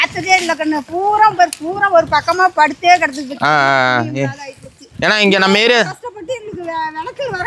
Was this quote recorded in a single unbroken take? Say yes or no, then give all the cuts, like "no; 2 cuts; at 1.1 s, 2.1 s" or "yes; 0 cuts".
yes; 0 cuts